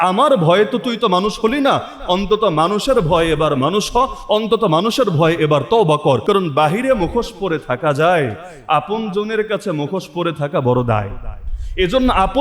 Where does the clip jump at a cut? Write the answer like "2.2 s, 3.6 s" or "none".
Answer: 6.2 s